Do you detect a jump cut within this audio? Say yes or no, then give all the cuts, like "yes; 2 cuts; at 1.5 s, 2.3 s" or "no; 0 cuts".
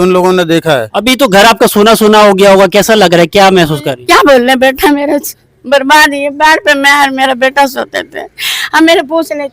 yes; 1 cut; at 0.9 s